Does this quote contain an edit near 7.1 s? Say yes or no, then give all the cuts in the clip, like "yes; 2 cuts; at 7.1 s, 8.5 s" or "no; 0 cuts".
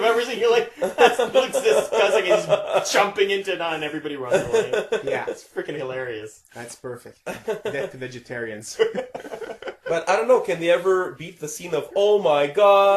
no; 1 cut; at 9.2 s